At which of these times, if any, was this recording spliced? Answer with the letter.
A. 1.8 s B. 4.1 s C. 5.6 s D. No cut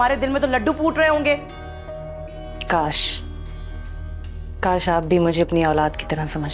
D